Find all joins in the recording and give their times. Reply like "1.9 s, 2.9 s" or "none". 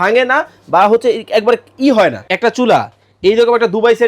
2.2 s